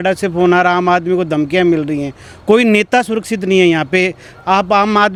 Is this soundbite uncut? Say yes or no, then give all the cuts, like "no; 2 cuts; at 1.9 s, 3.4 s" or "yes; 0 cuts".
yes; 0 cuts